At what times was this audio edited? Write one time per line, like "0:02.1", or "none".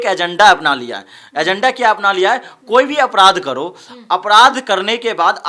none